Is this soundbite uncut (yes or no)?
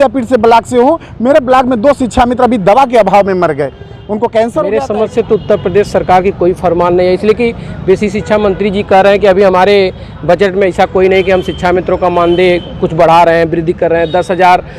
no